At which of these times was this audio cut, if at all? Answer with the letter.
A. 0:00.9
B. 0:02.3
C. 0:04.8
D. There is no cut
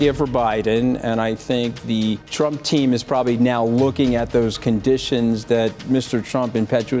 B